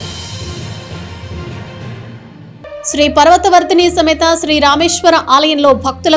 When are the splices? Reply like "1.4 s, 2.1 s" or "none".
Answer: 2.9 s